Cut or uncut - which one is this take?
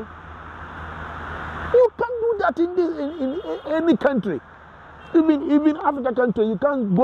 uncut